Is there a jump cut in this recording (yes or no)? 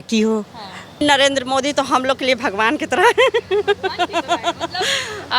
yes